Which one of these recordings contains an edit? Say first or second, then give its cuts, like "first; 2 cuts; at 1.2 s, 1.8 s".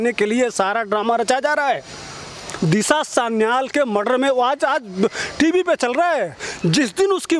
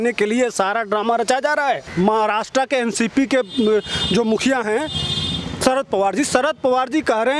second; 1 cut; at 1.9 s